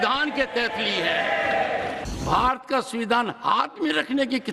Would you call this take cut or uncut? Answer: cut